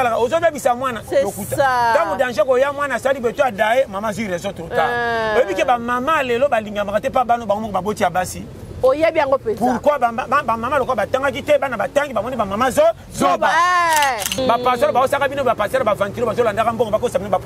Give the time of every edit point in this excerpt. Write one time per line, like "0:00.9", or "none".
0:14.4